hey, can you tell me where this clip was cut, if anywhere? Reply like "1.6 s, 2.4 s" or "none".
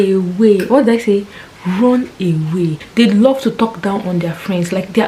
2.8 s